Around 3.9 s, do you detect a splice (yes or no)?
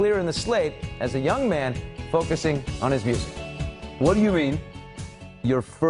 yes